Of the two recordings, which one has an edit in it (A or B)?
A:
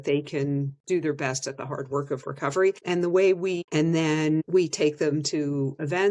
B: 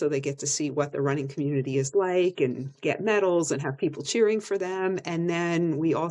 A